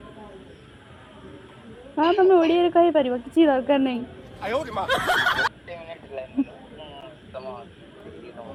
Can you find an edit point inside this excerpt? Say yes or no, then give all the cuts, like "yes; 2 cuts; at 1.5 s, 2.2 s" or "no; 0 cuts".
no; 0 cuts